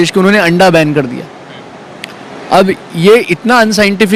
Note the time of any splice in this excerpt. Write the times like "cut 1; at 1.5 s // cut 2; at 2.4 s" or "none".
none

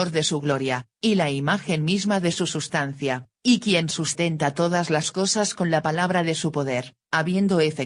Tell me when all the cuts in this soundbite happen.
none

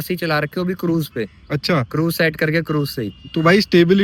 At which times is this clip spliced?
none

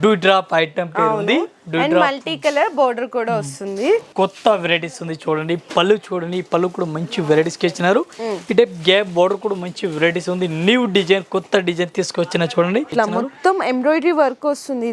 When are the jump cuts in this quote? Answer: cut 1; at 4.1 s // cut 2; at 12.9 s

